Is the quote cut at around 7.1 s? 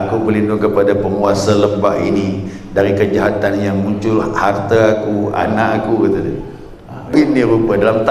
yes; 1 cut; at 7.1 s

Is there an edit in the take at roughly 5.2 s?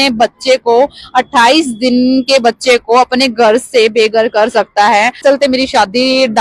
yes; 1 cut; at 5.2 s

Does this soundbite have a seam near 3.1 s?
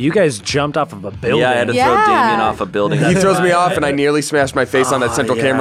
yes; 1 cut; at 3.1 s

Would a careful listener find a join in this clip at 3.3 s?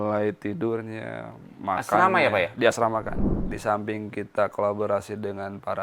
yes; 1 cut; at 3.3 s

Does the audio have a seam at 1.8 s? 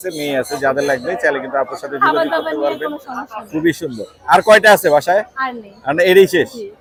no; 0 cuts

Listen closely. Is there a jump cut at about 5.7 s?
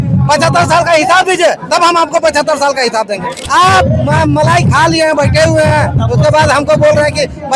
no; 1 cut; at 3.4 s

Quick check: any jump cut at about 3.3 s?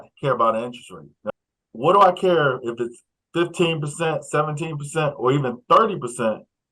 no; 1 cut; at 1.3 s

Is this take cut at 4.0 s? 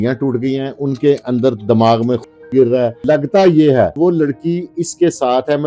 yes; 2 cuts; at 3.0 s, 4.0 s

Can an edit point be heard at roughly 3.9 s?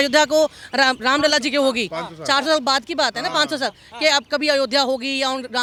no; 0 cuts

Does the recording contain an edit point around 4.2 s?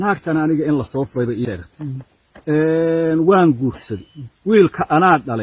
no; 1 cut; at 1.6 s

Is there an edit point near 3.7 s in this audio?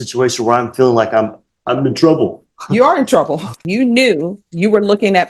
yes; 1 cut; at 3.7 s

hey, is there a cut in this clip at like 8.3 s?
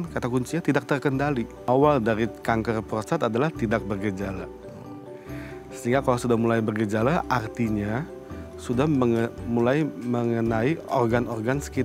no; 1 cut; at 1.7 s

